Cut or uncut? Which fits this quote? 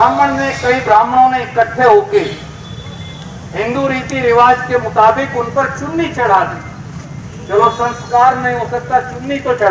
uncut